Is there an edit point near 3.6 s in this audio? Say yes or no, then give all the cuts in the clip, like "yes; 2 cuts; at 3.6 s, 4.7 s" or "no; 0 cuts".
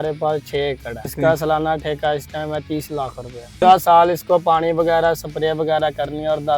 yes; 2 cuts; at 1.1 s, 3.6 s